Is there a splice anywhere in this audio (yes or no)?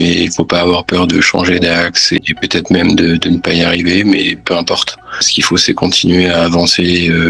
yes